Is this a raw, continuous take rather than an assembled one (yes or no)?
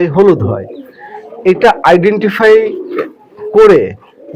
yes